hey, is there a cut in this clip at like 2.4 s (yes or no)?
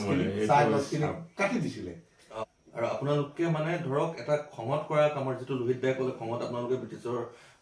yes